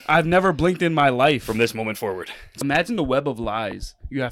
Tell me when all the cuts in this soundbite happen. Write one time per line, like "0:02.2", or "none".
0:02.6